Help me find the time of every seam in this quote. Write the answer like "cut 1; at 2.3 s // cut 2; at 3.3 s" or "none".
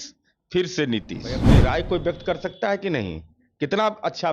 cut 1; at 1.5 s